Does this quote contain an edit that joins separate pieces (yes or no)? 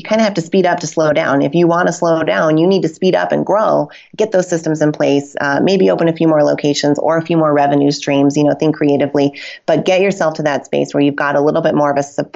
no